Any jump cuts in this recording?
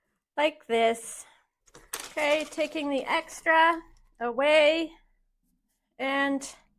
no; 0 cuts

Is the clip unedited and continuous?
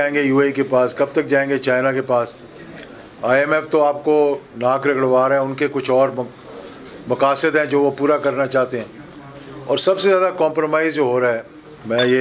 yes; 0 cuts

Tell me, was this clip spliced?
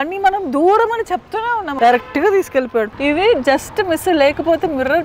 yes; 2 cuts; at 1.7 s, 2.9 s

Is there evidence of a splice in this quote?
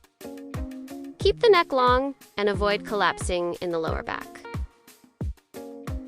yes; 2 cuts; at 1.1 s, 4.2 s

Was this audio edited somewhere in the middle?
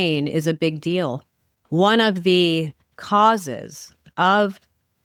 no; 0 cuts

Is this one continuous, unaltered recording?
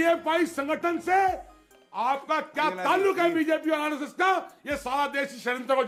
yes; 0 cuts

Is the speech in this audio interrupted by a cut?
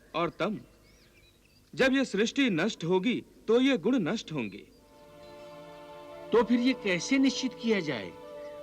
yes; 1 cut; at 5.1 s

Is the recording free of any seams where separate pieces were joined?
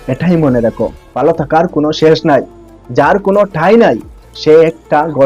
no; 1 cut; at 1.0 s

